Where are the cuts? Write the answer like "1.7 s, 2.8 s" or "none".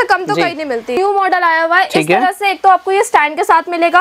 0.9 s